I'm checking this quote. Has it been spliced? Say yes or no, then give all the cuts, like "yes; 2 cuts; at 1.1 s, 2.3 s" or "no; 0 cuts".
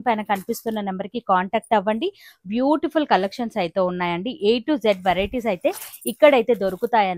no; 0 cuts